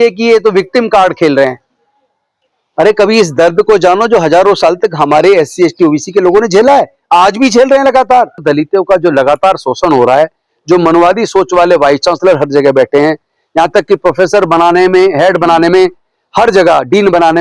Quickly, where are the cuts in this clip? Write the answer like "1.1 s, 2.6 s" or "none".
8.4 s